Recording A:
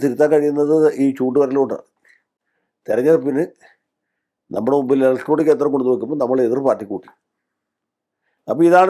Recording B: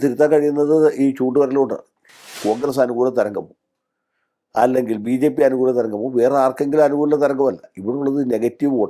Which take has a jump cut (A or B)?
B